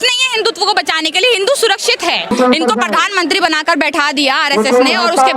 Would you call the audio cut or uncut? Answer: cut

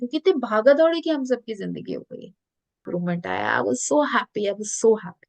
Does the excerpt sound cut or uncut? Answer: cut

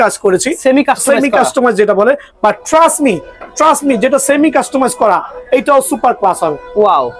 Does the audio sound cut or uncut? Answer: uncut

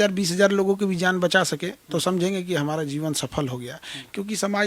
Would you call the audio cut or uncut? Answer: uncut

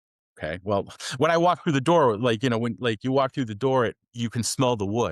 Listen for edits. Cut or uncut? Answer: uncut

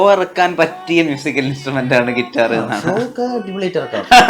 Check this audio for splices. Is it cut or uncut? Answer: uncut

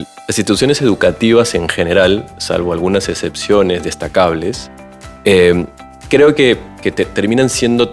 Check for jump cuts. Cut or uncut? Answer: uncut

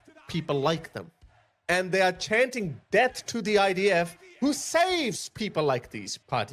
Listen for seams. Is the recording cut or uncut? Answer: uncut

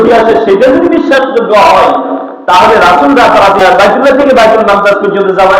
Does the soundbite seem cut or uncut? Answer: cut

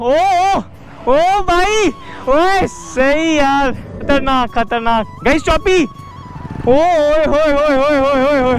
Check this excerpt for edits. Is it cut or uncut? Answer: cut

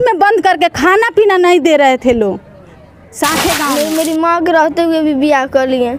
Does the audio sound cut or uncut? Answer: cut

